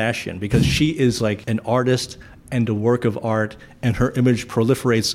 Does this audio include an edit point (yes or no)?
yes